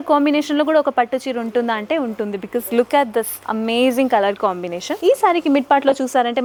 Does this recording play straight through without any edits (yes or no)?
yes